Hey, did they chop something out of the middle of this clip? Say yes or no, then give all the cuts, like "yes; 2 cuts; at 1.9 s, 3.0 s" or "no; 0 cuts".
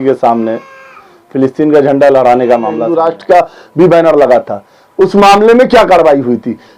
yes; 1 cut; at 2.9 s